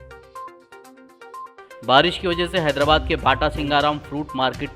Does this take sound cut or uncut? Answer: uncut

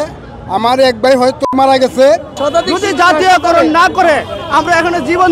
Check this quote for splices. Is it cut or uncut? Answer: cut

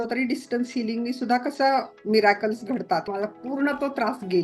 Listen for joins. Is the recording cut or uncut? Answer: cut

